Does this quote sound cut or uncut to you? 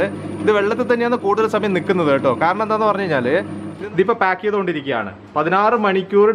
cut